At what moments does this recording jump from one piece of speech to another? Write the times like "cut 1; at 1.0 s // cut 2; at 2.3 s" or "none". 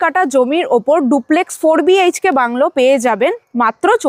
none